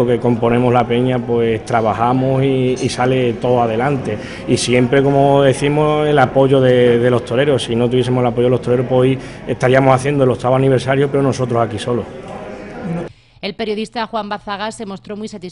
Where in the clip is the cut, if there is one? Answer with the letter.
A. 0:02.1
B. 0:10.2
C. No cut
B